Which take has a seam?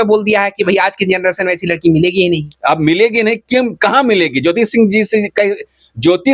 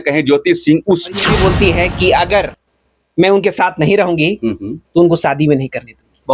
second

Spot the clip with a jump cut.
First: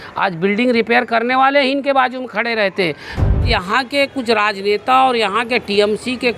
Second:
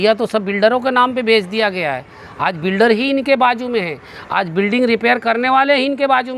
first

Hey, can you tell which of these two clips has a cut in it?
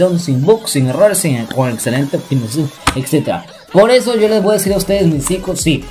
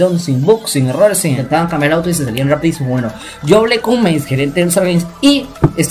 second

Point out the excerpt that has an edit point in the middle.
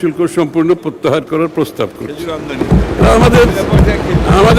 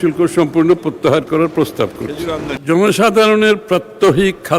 second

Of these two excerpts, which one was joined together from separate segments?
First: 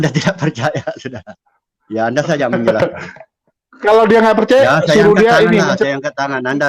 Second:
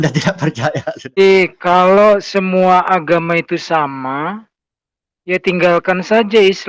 second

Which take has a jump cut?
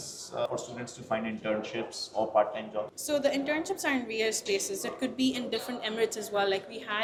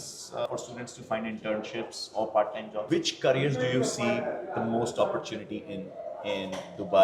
second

